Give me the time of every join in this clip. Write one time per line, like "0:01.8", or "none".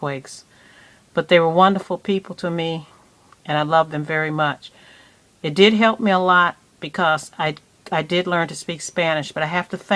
0:01.5